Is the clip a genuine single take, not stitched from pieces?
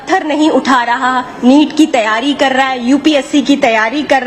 yes; 0 cuts

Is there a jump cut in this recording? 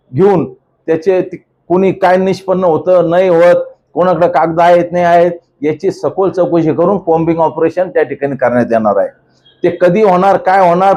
no; 0 cuts

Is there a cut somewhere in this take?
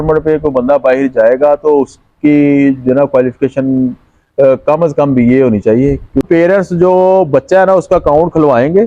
yes; 1 cut; at 6.3 s

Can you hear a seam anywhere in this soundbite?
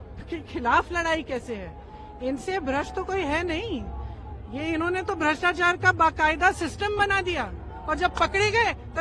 no; 0 cuts

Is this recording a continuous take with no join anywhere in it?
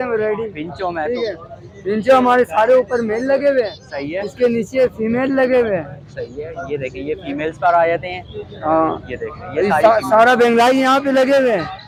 yes; 0 cuts

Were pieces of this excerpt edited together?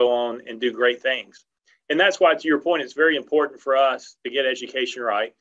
no; 0 cuts

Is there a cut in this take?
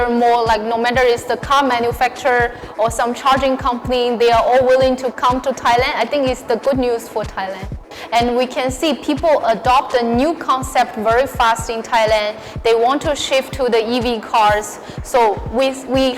yes; 1 cut; at 7.8 s

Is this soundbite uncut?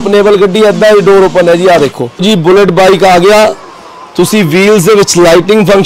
no; 1 cut; at 2.2 s

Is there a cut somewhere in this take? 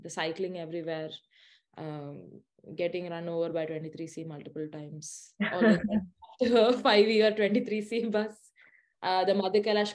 no; 0 cuts

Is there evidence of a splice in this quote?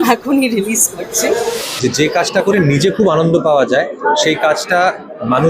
yes; 1 cut; at 1.6 s

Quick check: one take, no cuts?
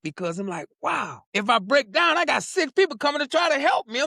no; 1 cut; at 1.2 s

